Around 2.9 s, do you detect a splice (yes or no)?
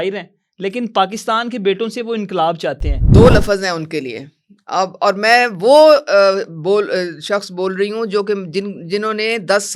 yes